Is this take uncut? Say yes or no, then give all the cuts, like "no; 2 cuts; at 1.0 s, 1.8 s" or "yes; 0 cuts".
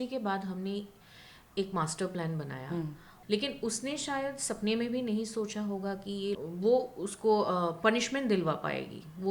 no; 2 cuts; at 3.1 s, 6.4 s